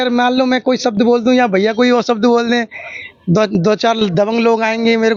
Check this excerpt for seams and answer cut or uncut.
uncut